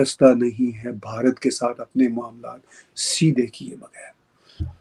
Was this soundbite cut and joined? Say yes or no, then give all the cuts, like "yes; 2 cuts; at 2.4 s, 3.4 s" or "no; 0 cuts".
no; 0 cuts